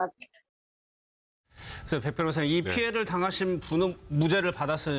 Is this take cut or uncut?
uncut